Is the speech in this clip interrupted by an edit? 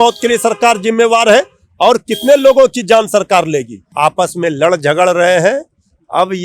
yes; 1 cut; at 3.8 s

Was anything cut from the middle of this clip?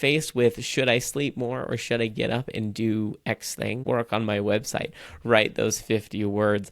yes; 1 cut; at 3.8 s

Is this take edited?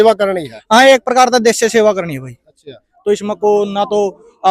no; 0 cuts

